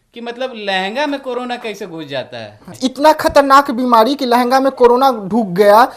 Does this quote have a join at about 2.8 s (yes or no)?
yes